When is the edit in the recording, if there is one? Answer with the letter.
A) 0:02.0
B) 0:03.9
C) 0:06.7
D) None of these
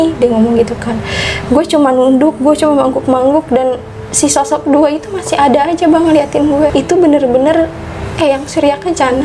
C